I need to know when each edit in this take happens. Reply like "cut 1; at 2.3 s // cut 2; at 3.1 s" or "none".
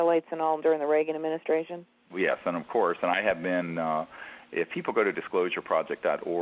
cut 1; at 4.7 s